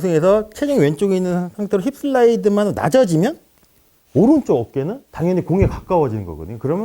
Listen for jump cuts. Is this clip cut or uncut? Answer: uncut